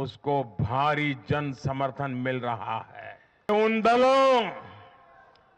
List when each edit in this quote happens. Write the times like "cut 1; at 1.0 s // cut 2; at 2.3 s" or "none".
cut 1; at 3.5 s